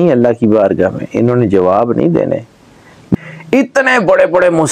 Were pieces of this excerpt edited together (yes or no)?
yes